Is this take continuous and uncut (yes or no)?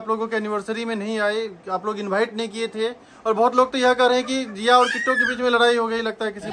yes